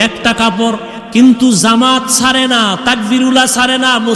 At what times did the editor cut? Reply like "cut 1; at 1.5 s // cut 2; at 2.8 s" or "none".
cut 1; at 0.9 s